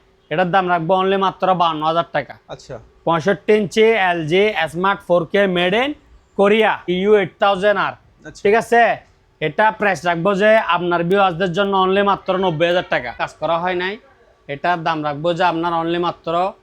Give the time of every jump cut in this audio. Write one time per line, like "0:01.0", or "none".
0:06.8
0:13.3

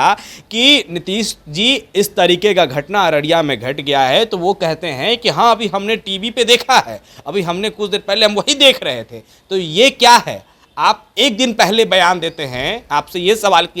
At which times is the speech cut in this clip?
none

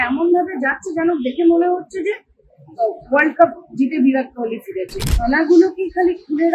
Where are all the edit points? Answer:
0:05.0

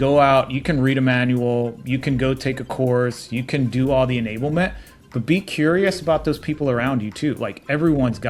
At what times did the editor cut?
none

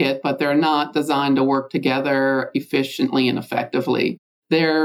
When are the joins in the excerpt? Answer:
none

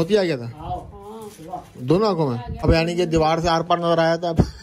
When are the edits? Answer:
0:02.5

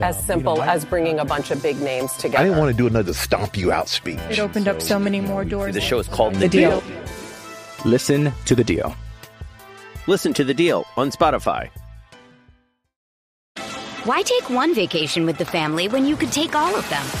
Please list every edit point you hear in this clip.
0:13.5

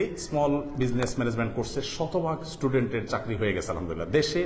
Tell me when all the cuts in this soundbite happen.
none

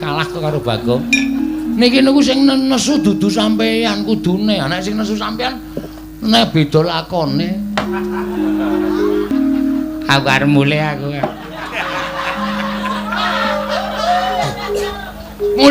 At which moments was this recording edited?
0:09.3

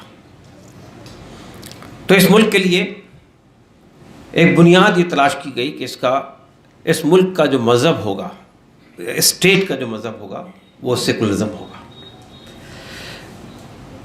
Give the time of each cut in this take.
none

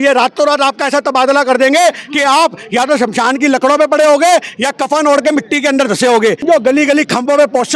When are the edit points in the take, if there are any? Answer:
0:06.4

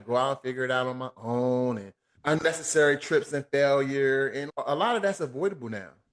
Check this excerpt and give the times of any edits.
0:02.1

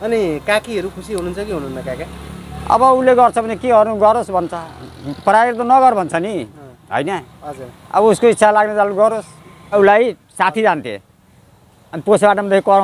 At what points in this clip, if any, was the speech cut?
0:09.7

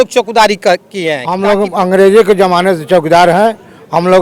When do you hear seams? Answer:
0:01.2

